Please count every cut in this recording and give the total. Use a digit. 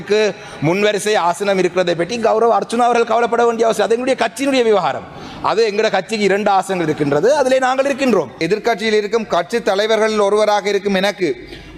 1